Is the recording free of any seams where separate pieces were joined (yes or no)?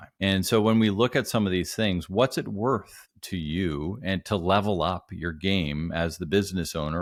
yes